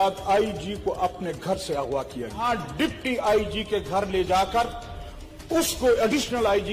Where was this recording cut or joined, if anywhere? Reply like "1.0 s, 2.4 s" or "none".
2.4 s